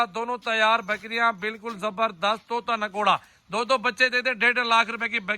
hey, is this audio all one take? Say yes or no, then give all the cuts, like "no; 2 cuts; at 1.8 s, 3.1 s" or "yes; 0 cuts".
yes; 0 cuts